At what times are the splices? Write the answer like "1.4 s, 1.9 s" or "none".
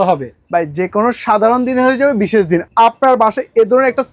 2.6 s